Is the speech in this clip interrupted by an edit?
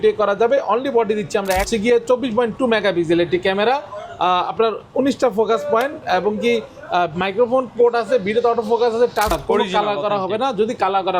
yes; 2 cuts; at 1.6 s, 9.3 s

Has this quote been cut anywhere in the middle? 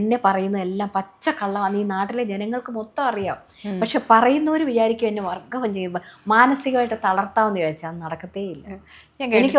no; 0 cuts

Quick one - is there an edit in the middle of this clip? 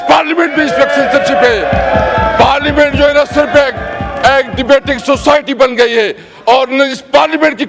no; 0 cuts

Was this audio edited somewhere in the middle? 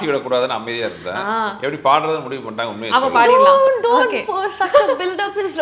no; 0 cuts

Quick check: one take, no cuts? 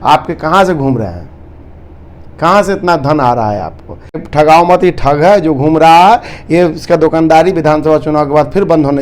no; 1 cut; at 4.2 s

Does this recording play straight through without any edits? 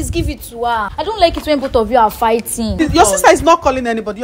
no; 2 cuts; at 0.9 s, 2.8 s

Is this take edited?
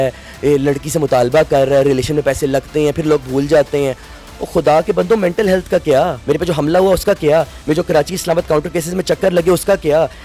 yes; 1 cut; at 6.2 s

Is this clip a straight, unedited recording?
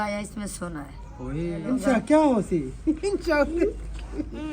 no; 1 cut; at 1.6 s

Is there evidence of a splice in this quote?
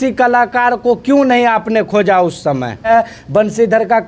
yes; 1 cut; at 2.9 s

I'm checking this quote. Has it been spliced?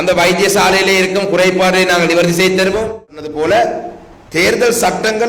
yes; 1 cut; at 3.2 s

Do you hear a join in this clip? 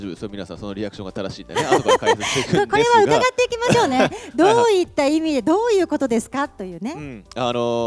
no; 0 cuts

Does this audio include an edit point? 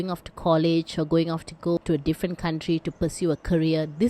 yes; 1 cut; at 1.8 s

